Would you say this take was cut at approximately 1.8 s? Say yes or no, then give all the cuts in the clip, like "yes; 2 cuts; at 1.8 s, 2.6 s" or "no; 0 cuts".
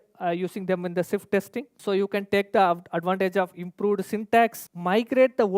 yes; 2 cuts; at 1.8 s, 4.7 s